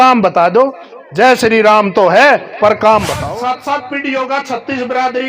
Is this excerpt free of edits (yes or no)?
no